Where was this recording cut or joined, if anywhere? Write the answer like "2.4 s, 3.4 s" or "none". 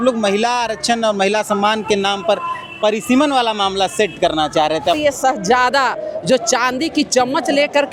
5.0 s